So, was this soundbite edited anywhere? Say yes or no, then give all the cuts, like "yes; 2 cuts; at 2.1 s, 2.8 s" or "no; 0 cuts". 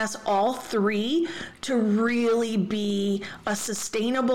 no; 0 cuts